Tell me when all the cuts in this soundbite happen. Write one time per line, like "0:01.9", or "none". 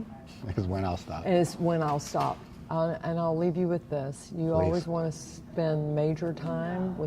0:02.5